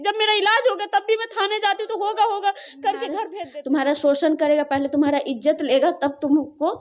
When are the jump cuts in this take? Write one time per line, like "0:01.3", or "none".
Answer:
0:03.2